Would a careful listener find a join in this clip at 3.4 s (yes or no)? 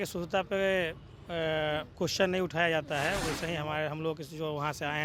no